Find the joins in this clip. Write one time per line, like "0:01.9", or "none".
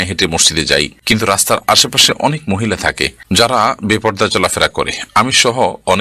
0:01.0
0:03.1

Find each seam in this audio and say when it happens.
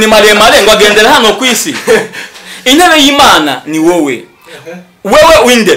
none

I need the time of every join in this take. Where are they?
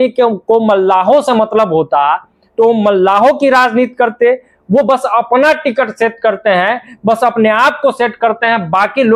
none

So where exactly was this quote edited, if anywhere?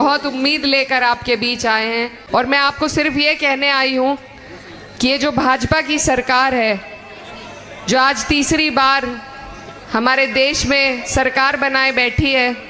0:02.2

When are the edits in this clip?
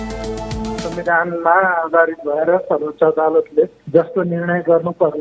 0:00.9

